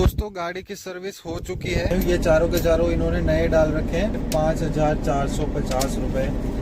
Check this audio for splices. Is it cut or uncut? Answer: cut